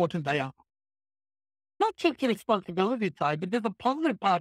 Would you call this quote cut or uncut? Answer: cut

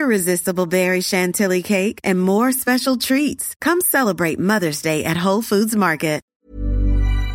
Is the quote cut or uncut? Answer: cut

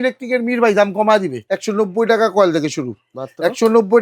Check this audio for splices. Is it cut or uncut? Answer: cut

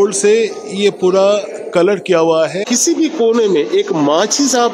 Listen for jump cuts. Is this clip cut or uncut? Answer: cut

